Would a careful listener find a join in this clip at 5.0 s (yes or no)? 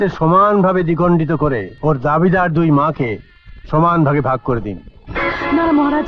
no